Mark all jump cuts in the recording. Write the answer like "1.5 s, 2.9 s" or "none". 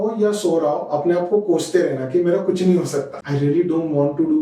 3.2 s